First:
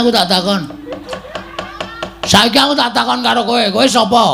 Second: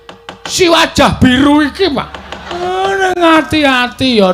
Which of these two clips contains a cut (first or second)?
second